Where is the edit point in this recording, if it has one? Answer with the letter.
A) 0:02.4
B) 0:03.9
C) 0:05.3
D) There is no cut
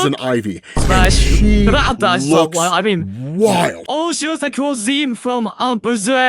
B